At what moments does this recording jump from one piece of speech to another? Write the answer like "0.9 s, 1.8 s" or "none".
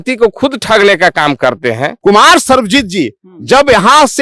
1.9 s